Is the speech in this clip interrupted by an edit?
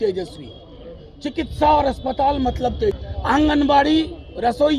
yes; 1 cut; at 3.0 s

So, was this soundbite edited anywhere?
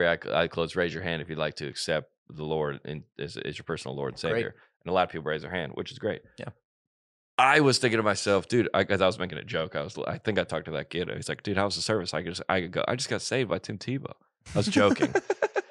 no; 0 cuts

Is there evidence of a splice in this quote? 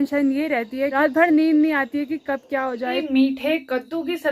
yes; 2 cuts; at 0.9 s, 3.0 s

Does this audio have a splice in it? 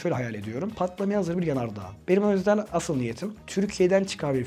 yes; 1 cut; at 1.9 s

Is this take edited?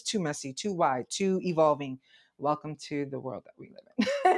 no; 0 cuts

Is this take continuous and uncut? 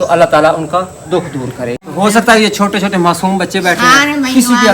no; 1 cut; at 1.8 s

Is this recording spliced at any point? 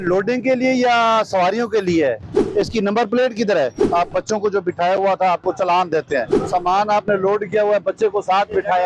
yes; 3 cuts; at 2.4 s, 3.8 s, 6.4 s

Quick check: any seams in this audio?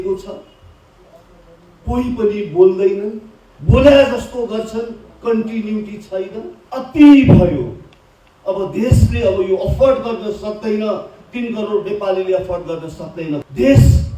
yes; 2 cuts; at 6.6 s, 13.4 s

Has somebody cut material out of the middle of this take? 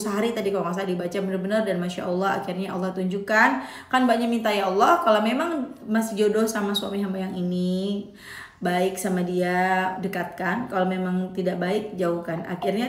no; 0 cuts

